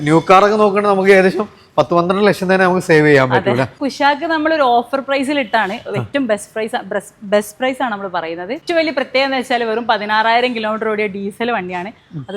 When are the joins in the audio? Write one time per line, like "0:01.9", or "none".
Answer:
0:03.8
0:08.6